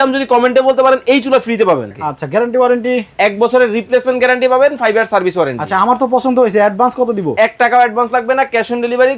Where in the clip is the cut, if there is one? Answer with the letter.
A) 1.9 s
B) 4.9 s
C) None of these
A